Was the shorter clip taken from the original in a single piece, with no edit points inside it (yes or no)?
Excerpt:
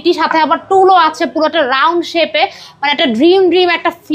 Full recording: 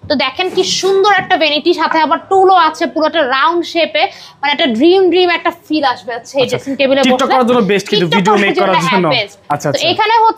yes